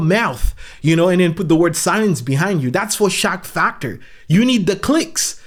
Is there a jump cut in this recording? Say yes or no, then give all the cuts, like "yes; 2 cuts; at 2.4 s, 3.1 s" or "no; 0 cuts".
no; 0 cuts